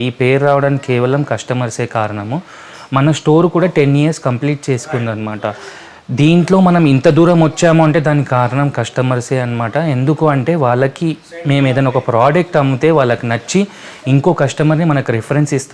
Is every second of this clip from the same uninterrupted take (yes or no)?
yes